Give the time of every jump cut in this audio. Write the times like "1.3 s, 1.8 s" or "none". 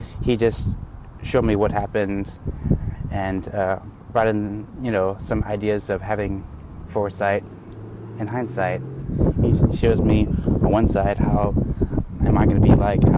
9.0 s